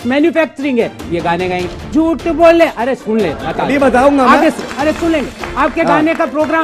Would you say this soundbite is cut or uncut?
uncut